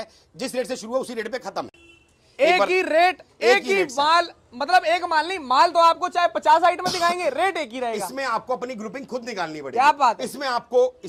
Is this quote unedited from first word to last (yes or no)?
yes